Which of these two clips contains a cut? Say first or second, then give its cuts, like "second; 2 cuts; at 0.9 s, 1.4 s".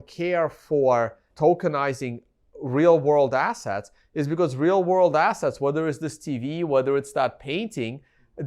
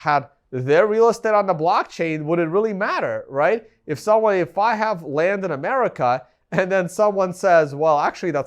first; 1 cut; at 1.2 s